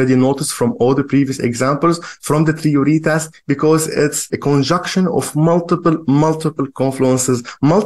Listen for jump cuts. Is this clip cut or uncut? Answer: cut